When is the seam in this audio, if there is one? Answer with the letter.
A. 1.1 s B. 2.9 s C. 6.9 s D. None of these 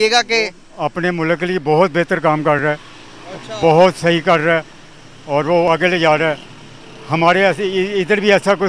D